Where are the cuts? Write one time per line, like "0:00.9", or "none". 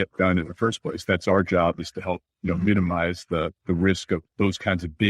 0:02.3
0:03.6
0:04.3